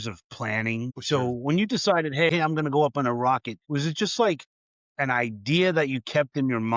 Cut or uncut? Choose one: cut